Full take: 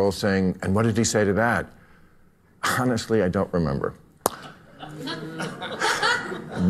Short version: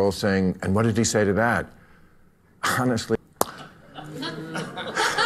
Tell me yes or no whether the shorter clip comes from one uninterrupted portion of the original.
no